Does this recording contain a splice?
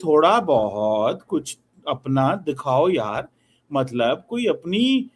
no; 0 cuts

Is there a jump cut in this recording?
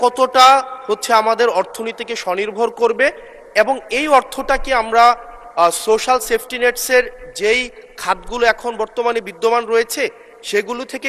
no; 0 cuts

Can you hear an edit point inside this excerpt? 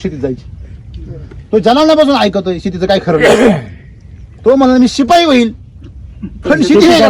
no; 0 cuts

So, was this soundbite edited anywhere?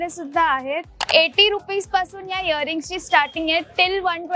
yes; 1 cut; at 0.9 s

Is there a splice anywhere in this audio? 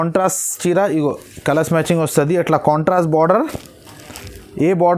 no; 0 cuts

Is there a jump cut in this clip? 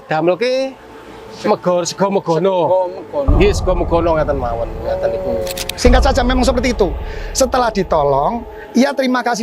yes; 1 cut; at 5.7 s

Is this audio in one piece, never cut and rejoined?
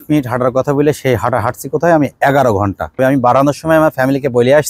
no; 1 cut; at 2.9 s

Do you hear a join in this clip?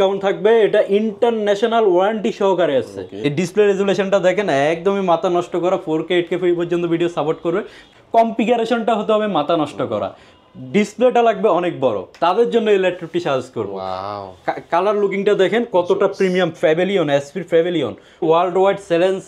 yes; 3 cuts; at 3.1 s, 7.9 s, 18.2 s

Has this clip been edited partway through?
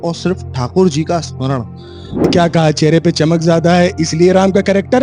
yes; 1 cut; at 2.3 s

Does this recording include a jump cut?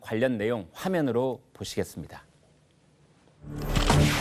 no; 0 cuts

